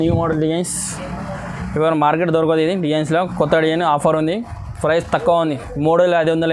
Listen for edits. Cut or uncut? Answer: uncut